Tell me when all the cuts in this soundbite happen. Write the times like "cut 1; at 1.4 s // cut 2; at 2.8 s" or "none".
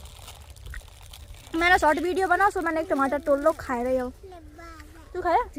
none

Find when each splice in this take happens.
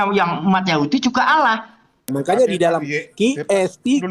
cut 1; at 2.1 s

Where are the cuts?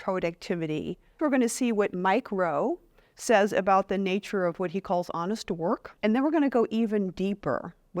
cut 1; at 1.2 s // cut 2; at 5.9 s

